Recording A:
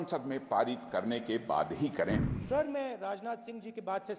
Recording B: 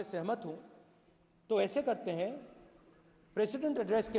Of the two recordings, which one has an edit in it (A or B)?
A